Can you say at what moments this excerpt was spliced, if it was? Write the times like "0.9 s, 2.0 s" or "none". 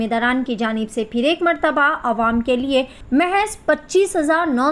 3.0 s